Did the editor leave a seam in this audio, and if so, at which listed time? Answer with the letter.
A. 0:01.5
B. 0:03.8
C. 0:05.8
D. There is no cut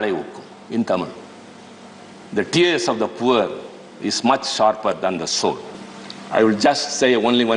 C